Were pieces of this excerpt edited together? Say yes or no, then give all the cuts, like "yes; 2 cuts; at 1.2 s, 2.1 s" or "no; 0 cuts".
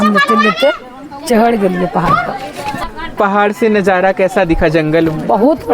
yes; 1 cut; at 2.9 s